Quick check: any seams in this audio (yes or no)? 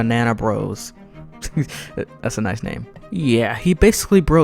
yes